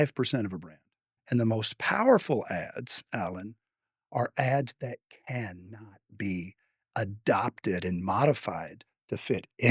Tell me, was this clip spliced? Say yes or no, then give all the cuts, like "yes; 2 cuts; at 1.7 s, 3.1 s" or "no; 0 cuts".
yes; 1 cut; at 1.2 s